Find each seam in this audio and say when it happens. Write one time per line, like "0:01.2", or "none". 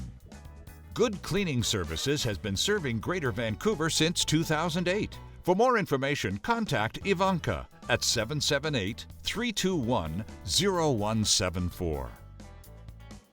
0:12.1